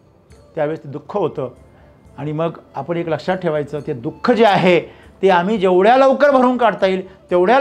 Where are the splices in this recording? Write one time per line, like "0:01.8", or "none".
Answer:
none